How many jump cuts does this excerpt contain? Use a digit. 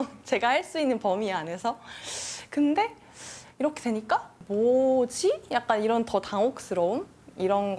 1